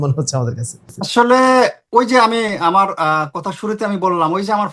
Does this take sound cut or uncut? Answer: uncut